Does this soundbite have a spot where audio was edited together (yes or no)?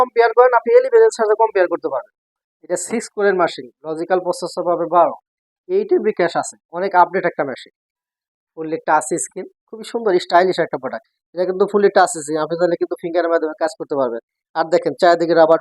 yes